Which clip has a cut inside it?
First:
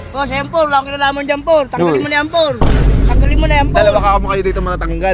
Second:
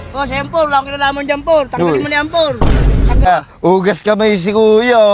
second; 1 cut; at 3.3 s

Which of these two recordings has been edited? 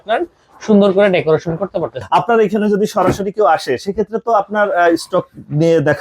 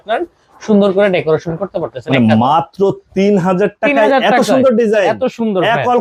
first; 1 cut; at 2.0 s

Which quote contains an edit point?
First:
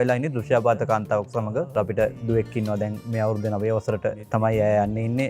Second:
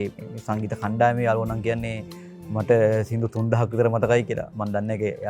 first; 3 cuts; at 2.1 s, 3.0 s, 4.2 s

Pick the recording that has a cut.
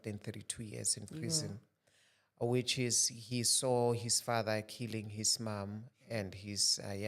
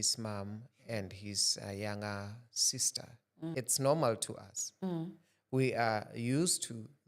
second; 1 cut; at 3.5 s

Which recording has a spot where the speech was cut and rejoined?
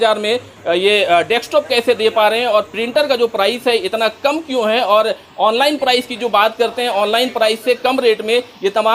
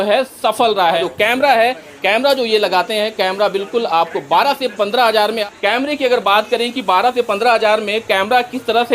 second; 2 cuts; at 1.0 s, 5.4 s

